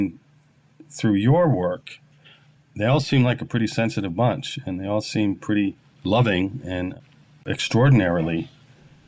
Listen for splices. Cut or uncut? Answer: cut